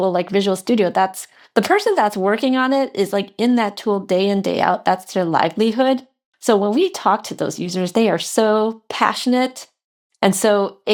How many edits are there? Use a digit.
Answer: 0